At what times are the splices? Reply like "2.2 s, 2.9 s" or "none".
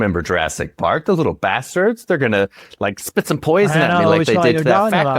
none